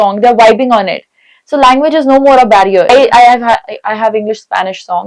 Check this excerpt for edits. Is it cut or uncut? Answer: cut